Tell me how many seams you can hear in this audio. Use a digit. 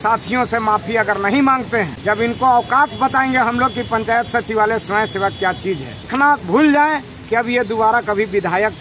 2